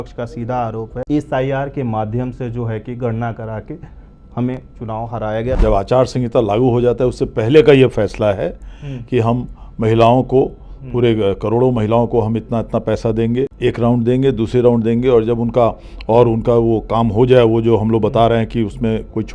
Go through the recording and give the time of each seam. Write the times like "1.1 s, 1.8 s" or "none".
1.0 s, 5.6 s, 13.5 s